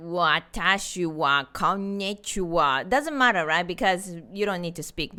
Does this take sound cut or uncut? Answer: uncut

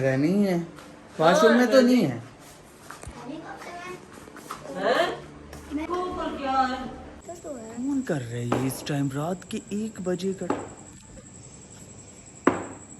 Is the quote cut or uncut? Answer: cut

